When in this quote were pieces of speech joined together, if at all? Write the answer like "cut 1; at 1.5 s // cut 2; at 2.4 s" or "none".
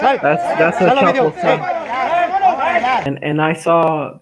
cut 1; at 3.0 s